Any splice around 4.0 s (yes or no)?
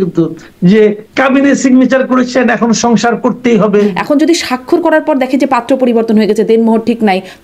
yes